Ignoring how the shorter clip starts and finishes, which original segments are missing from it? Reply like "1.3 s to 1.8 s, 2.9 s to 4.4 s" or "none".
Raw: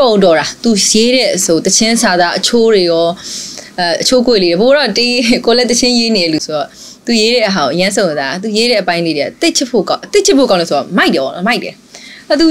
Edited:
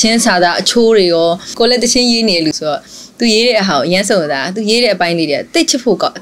3.3 s to 5.4 s